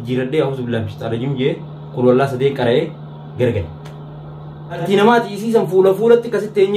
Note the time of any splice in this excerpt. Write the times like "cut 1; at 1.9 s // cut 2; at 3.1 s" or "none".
cut 1; at 4.8 s